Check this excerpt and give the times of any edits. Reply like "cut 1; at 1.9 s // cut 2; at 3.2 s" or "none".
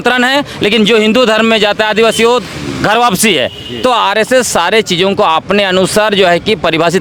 none